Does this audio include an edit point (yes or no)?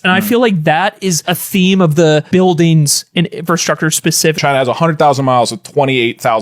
yes